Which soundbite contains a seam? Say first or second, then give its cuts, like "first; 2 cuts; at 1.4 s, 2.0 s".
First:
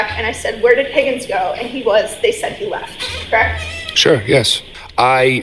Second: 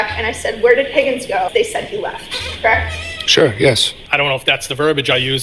second; 2 cuts; at 1.5 s, 4.0 s